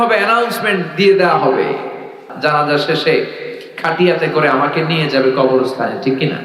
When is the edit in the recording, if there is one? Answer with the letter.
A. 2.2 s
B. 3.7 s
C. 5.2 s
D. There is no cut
A